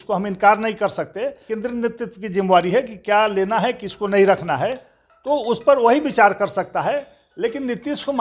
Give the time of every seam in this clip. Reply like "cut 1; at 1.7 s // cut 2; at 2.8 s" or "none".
cut 1; at 1.4 s

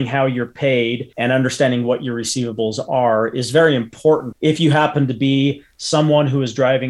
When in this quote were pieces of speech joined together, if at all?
cut 1; at 1.1 s // cut 2; at 4.3 s

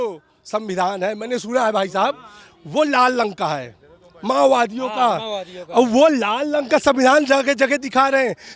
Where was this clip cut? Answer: none

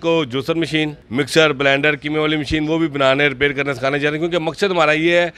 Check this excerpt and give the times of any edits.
cut 1; at 1.0 s

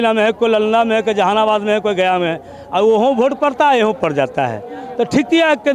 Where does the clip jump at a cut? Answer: none

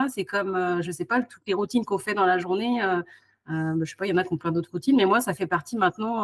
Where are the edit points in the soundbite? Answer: none

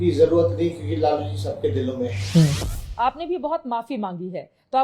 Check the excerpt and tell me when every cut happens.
cut 1; at 2.8 s

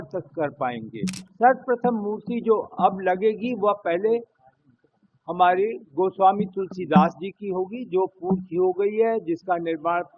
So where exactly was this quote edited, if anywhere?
cut 1; at 1.2 s

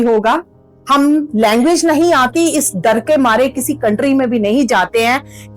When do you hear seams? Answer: none

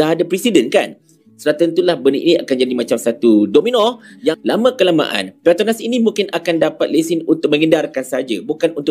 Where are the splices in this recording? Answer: cut 1; at 1.2 s // cut 2; at 4.4 s

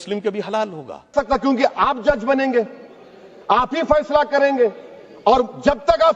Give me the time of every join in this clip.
cut 1; at 1.1 s

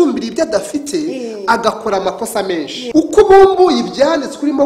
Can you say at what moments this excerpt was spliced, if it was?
cut 1; at 2.8 s

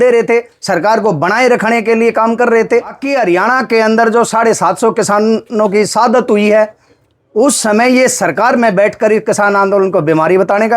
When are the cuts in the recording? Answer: cut 1; at 3.0 s

